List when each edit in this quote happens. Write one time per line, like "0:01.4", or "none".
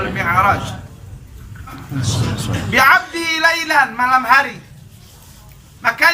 0:01.8